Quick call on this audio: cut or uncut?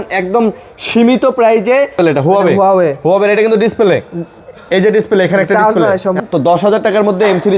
cut